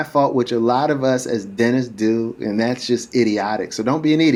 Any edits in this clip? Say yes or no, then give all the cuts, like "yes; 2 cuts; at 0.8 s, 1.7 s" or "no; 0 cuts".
no; 0 cuts